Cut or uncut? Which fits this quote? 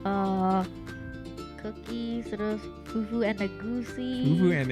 uncut